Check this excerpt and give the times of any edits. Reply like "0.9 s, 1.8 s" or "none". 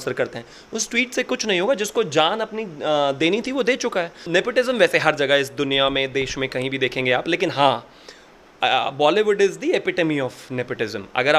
4.2 s